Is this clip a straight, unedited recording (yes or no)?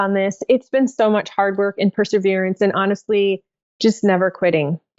yes